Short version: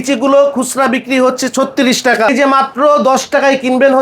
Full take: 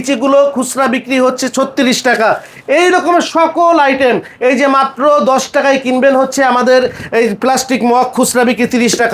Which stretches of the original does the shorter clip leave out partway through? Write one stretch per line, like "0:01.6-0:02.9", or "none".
0:02.3-0:04.5